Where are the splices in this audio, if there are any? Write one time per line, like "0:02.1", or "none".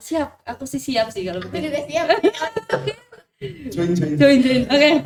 none